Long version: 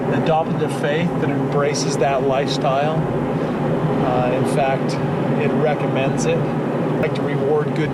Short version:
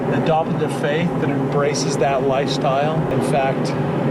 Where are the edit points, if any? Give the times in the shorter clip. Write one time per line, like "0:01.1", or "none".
0:03.1